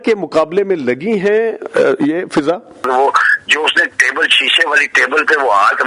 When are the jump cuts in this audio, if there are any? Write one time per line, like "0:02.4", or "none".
0:02.8